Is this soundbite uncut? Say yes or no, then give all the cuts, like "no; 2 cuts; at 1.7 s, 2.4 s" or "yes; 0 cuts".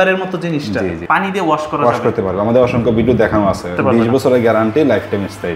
no; 2 cuts; at 1.0 s, 3.8 s